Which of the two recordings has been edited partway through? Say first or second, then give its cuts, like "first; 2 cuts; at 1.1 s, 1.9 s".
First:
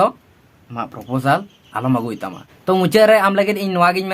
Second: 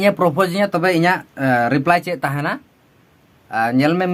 first; 1 cut; at 2.5 s